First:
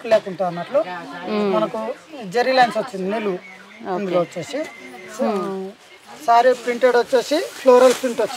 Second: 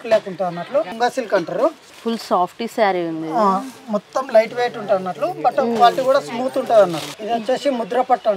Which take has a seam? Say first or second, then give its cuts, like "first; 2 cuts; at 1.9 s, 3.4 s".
second; 2 cuts; at 0.9 s, 7.1 s